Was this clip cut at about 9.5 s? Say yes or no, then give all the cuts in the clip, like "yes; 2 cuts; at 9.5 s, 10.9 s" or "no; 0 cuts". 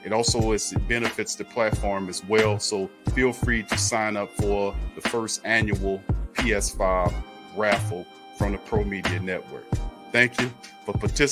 no; 0 cuts